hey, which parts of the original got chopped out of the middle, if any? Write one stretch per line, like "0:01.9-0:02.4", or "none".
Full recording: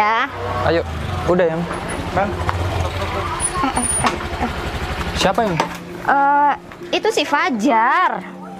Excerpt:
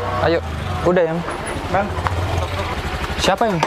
0:03.2-0:04.7